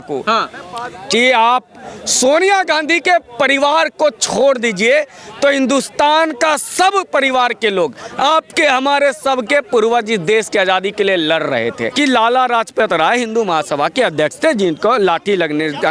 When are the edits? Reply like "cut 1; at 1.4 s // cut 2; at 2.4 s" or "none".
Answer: cut 1; at 11.8 s